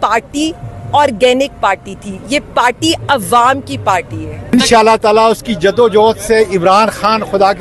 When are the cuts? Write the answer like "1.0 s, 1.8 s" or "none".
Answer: 4.5 s